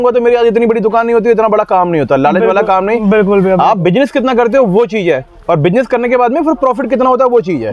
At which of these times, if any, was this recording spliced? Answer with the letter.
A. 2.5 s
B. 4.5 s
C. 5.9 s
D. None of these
D